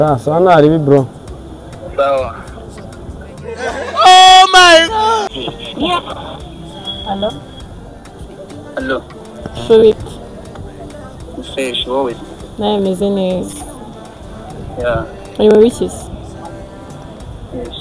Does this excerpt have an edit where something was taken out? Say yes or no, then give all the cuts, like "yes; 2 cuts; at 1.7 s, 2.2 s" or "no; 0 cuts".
yes; 1 cut; at 5.3 s